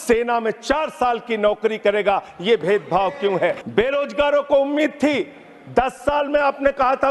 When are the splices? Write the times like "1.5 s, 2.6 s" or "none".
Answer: 3.6 s